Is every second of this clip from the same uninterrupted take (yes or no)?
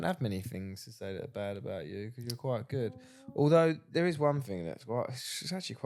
yes